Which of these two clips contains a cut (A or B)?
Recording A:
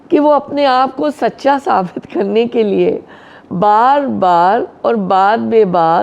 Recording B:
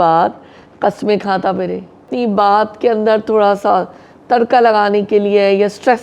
B